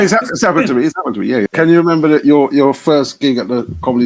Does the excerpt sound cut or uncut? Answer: cut